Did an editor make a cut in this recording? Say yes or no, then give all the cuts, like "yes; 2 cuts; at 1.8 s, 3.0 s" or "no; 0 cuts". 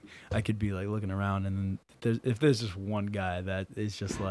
no; 0 cuts